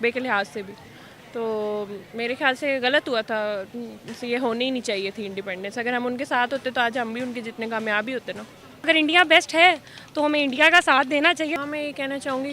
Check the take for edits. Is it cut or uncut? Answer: cut